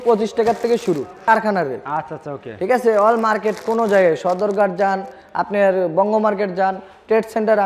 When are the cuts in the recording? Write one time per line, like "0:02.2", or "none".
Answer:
0:01.2